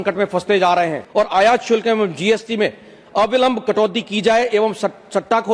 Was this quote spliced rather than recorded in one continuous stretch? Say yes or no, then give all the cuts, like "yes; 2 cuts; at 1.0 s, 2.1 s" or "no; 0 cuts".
yes; 1 cut; at 1.0 s